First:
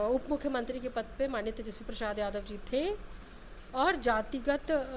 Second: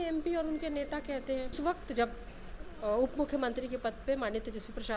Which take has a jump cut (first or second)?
second